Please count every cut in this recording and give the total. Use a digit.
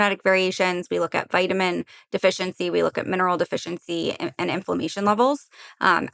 0